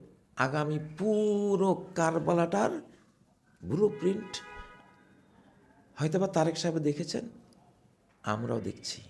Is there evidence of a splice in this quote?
no; 0 cuts

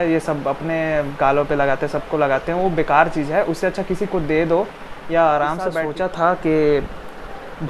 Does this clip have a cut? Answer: yes; 1 cut; at 5.8 s

